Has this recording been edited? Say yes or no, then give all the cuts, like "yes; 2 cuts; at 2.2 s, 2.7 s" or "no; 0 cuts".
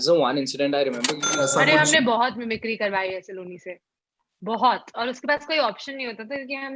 yes; 1 cut; at 1.2 s